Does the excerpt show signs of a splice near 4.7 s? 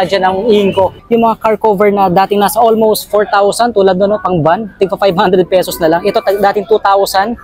no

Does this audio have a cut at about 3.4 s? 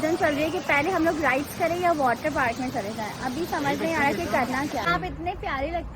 no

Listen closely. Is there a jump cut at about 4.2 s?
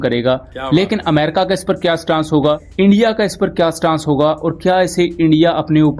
no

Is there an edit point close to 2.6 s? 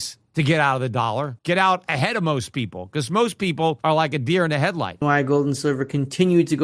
no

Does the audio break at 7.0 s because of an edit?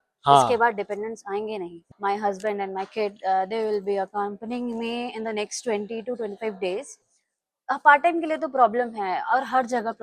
yes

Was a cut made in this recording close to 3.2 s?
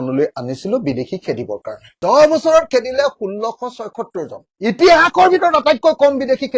no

